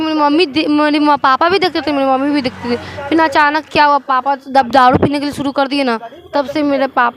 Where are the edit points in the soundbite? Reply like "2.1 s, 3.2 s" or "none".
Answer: none